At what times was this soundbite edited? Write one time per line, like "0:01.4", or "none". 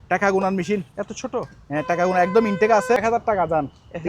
0:03.0

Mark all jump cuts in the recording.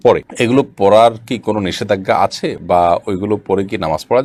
none

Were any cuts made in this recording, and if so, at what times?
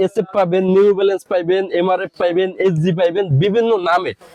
none

